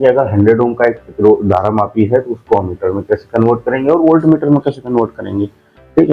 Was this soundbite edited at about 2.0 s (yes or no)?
no